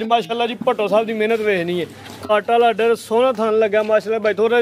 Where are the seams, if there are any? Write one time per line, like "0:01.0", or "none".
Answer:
none